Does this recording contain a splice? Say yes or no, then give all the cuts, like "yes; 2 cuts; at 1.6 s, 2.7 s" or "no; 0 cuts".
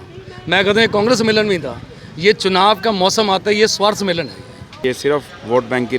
yes; 1 cut; at 4.8 s